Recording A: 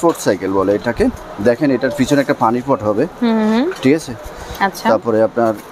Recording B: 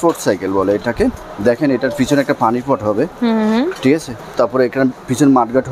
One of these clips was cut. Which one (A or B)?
B